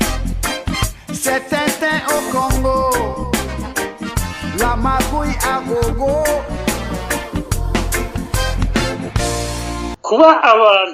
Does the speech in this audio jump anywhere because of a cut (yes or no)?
yes